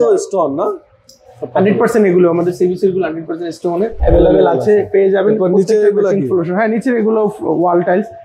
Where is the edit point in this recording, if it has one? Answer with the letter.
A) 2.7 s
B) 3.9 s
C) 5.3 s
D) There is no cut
B